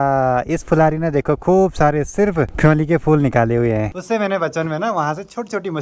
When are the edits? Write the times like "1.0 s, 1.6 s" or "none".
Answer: 2.5 s, 3.9 s